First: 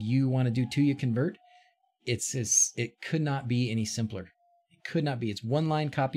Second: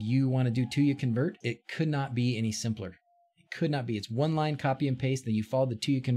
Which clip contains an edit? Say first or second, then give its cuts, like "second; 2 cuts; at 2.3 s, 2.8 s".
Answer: second; 1 cut; at 1.4 s